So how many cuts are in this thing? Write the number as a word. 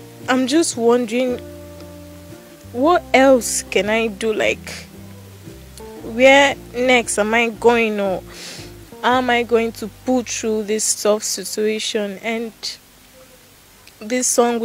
two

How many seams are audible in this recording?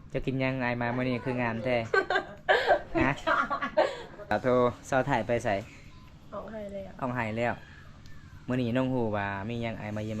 one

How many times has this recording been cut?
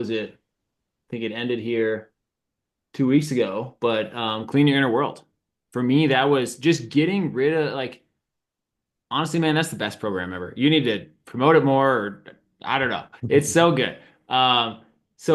zero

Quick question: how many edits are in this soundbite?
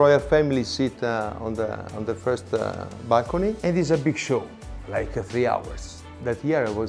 zero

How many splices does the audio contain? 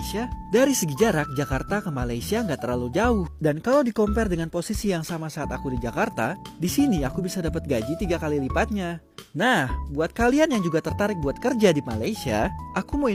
zero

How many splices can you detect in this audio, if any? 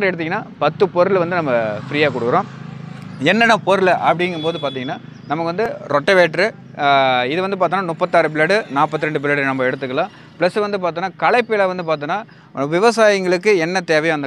zero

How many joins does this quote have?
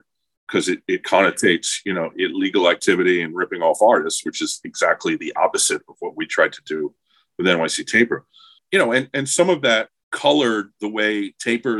two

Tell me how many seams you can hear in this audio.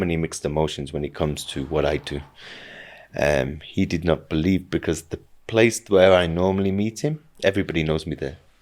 zero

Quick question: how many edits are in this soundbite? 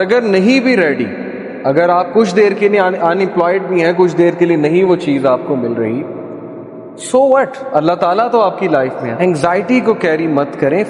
one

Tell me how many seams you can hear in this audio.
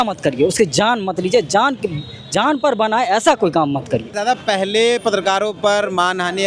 zero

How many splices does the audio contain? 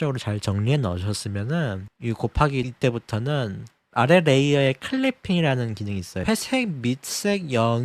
one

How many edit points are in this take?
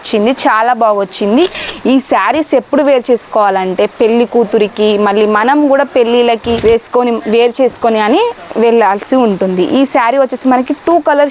one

